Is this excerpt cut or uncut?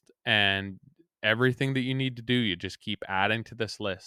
uncut